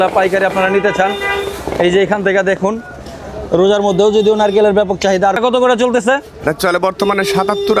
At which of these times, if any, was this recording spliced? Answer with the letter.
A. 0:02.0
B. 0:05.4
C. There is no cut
B